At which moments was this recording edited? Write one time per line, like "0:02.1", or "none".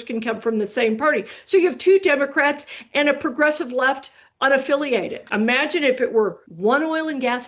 0:05.3
0:06.4

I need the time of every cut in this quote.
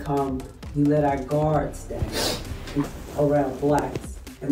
0:02.8

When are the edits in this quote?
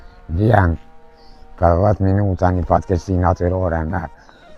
none

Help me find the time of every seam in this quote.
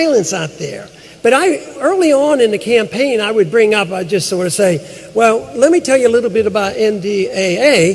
0:04.5

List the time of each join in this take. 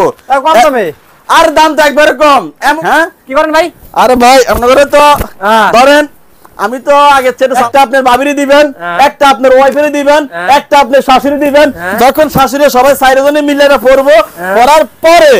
0:02.8
0:07.6

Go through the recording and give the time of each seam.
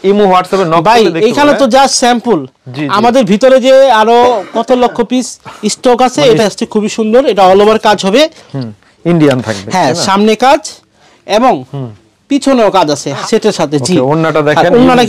0:06.4
0:13.1

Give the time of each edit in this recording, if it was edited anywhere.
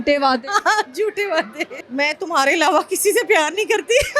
0:01.8

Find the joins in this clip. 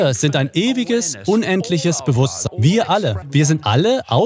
0:02.4
0:03.2

